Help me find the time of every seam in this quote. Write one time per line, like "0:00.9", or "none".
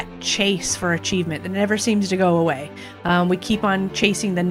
none